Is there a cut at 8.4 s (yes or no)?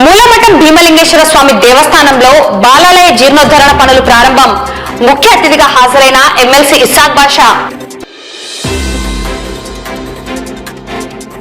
no